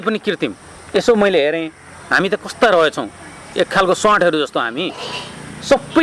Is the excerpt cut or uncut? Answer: uncut